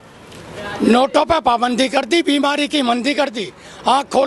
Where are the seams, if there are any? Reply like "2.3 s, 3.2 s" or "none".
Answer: none